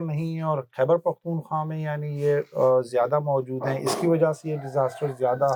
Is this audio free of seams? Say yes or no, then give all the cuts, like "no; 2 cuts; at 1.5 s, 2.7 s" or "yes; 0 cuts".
yes; 0 cuts